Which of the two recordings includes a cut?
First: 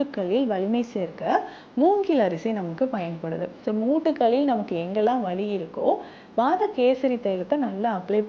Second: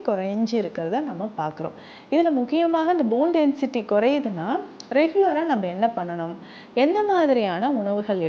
first; 1 cut; at 3.5 s

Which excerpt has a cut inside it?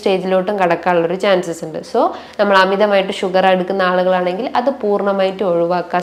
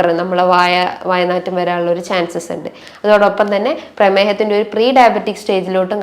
second; 1 cut; at 2.8 s

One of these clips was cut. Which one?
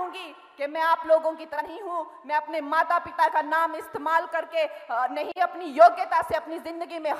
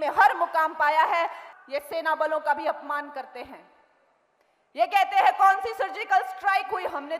second; 1 cut; at 1.4 s

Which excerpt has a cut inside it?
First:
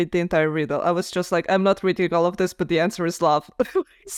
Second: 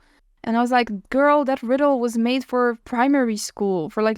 second; 1 cut; at 2.9 s

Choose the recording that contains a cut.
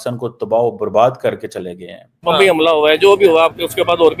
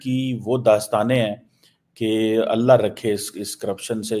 first; 1 cut; at 2.1 s

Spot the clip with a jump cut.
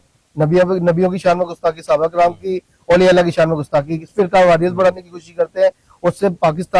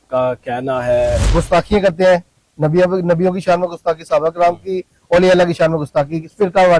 second; 1 cut; at 1.2 s

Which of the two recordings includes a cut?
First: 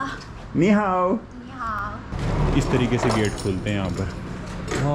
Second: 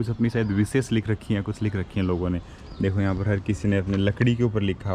first; 1 cut; at 2.2 s

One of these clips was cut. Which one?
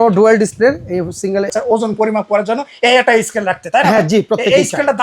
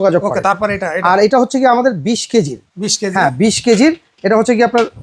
first; 1 cut; at 1.5 s

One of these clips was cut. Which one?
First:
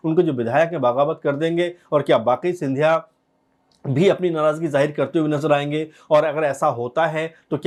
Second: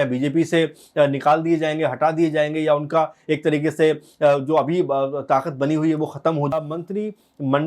second; 1 cut; at 6.5 s

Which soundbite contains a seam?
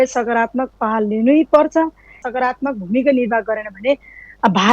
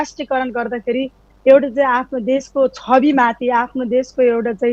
first; 1 cut; at 2.2 s

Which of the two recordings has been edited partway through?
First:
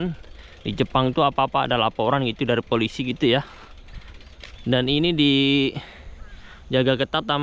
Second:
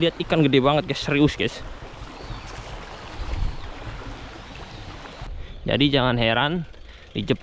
second; 1 cut; at 5.3 s

